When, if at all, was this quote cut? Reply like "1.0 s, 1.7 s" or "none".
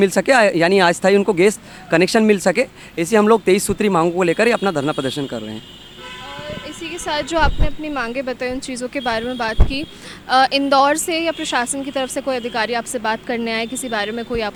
none